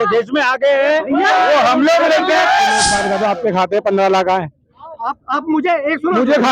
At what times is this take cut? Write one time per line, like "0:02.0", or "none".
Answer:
0:03.0